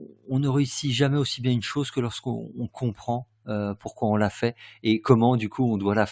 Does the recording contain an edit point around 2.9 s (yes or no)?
no